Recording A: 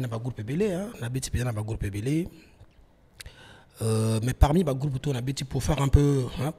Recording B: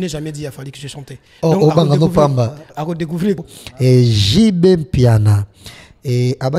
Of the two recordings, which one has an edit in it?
B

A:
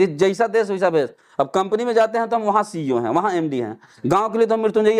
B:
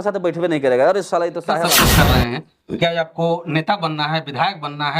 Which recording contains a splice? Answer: B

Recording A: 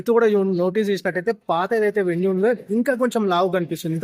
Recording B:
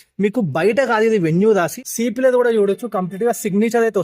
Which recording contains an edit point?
B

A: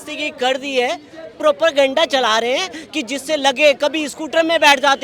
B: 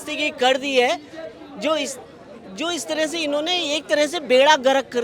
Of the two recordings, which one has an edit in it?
A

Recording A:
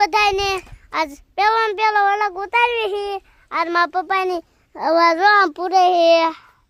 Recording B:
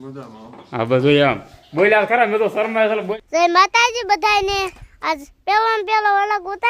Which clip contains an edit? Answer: B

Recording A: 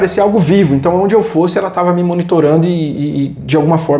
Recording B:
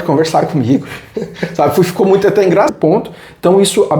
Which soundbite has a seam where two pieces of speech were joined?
B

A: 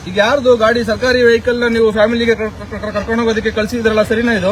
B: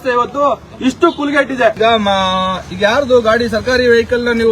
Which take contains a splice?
B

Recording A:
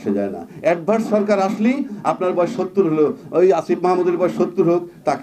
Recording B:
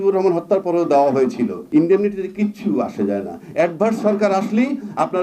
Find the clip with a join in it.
B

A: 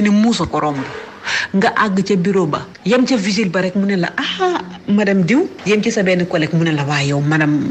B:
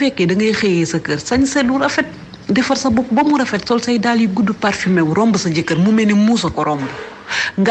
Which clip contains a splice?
A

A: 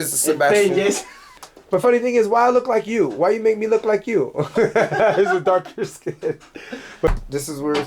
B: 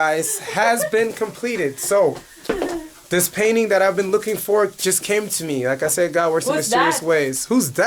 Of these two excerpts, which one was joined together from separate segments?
A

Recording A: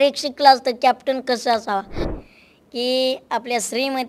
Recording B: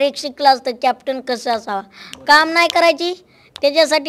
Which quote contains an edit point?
A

